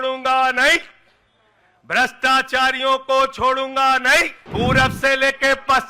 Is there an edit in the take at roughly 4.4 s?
yes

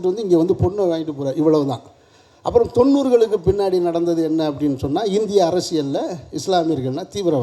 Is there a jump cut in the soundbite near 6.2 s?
no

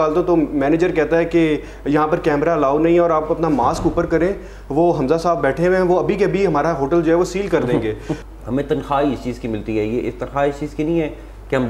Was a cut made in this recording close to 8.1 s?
yes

